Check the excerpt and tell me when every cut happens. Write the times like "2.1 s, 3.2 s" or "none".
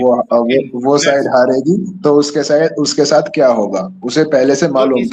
none

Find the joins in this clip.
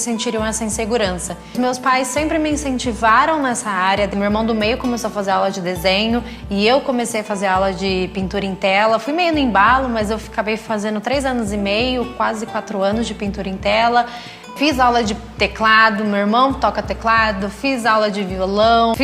10.8 s

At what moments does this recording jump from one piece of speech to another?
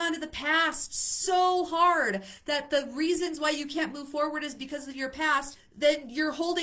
5.6 s

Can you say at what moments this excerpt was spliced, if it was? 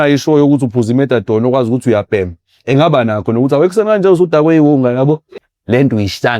5.3 s

